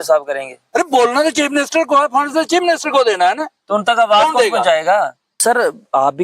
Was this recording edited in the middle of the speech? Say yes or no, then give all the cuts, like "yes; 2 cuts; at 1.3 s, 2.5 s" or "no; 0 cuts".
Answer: yes; 1 cut; at 5.3 s